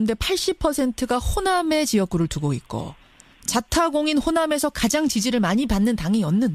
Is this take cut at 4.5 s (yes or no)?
yes